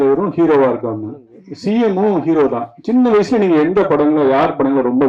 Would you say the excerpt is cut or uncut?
uncut